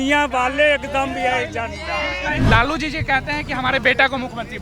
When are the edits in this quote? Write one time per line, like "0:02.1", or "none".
0:02.4